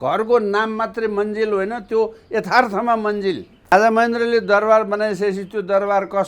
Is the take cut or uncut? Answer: cut